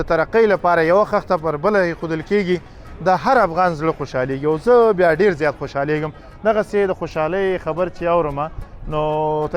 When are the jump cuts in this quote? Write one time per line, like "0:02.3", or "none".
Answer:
none